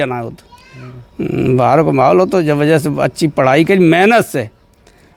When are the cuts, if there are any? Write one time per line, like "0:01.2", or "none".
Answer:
none